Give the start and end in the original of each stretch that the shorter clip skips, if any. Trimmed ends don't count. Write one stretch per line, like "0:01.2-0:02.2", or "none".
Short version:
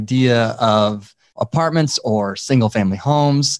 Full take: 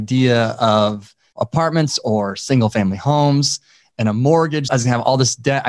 none